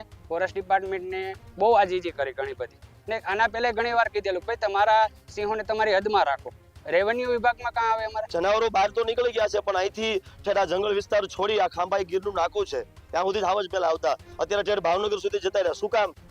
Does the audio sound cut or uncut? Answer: cut